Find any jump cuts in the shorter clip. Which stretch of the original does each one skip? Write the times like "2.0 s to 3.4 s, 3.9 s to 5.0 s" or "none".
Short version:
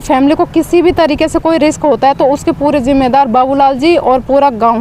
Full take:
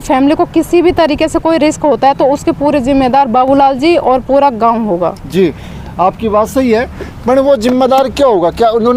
none